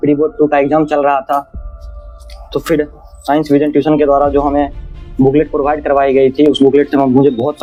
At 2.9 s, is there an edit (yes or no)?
no